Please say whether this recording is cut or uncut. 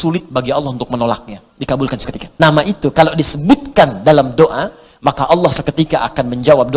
cut